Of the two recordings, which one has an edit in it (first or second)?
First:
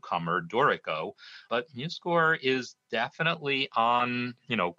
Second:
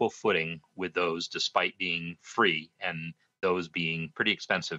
first